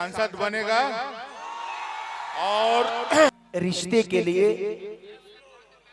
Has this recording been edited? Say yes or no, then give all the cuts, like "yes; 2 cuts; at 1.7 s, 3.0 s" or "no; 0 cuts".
yes; 1 cut; at 3.3 s